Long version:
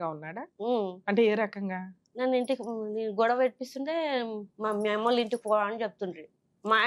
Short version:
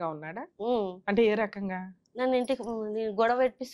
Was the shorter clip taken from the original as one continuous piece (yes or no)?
yes